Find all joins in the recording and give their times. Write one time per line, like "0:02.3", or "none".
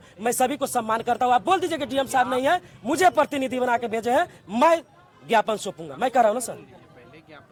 none